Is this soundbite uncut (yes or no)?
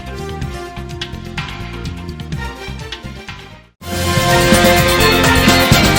yes